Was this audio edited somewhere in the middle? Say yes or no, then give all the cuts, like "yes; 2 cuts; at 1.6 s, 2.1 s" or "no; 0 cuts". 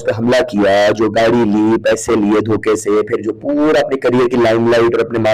no; 0 cuts